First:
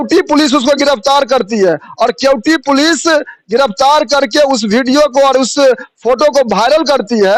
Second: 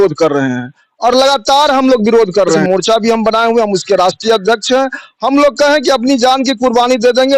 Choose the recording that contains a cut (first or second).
second